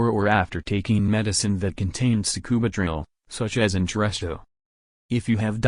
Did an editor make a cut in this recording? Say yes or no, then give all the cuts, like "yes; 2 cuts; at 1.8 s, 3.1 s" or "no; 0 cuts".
no; 0 cuts